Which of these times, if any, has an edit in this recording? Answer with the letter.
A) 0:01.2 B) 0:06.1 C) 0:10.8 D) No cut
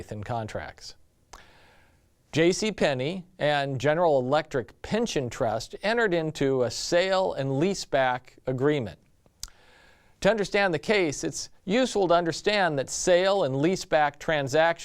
B